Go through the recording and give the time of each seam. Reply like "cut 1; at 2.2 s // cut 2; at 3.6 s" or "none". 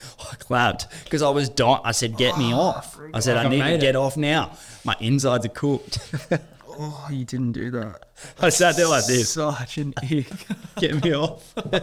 none